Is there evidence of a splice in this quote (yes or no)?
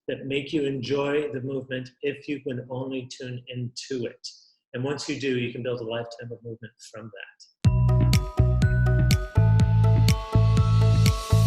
yes